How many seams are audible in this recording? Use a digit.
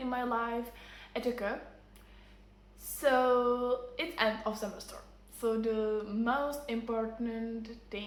0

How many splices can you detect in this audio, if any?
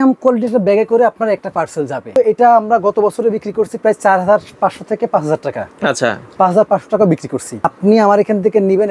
2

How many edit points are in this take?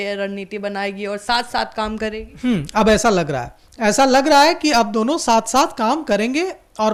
0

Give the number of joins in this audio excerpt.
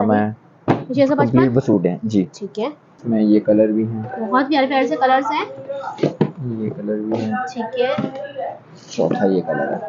1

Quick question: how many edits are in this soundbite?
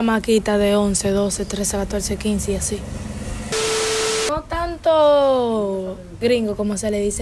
1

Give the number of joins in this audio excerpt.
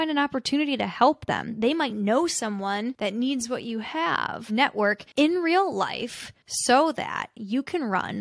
3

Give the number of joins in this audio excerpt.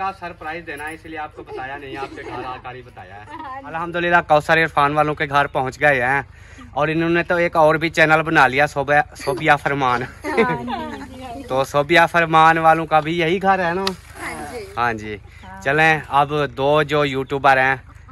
1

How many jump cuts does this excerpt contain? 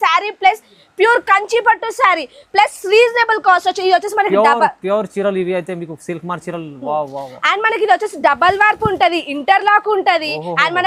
0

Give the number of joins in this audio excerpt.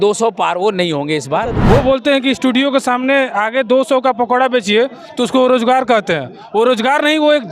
1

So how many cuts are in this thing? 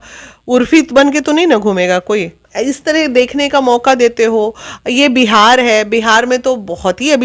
1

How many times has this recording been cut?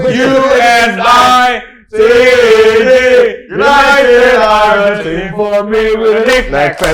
0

